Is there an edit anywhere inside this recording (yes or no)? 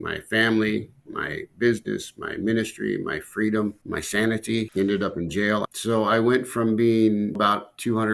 yes